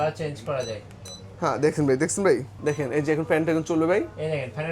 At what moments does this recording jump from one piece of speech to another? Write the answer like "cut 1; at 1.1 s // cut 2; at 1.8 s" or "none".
cut 1; at 2.5 s